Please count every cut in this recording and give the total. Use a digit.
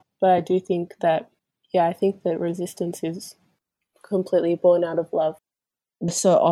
1